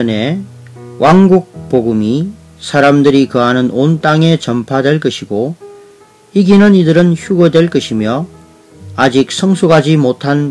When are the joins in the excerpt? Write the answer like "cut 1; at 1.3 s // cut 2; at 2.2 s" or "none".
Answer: none